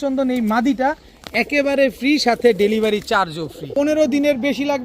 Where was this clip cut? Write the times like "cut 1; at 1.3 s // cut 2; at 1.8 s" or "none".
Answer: cut 1; at 3.6 s